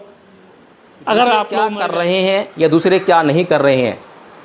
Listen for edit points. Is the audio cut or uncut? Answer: cut